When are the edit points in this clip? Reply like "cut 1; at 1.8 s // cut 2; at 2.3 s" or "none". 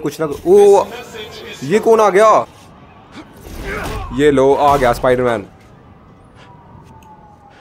cut 1; at 2.5 s